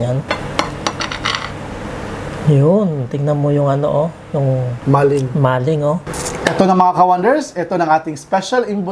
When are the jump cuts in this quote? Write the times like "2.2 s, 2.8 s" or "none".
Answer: 6.1 s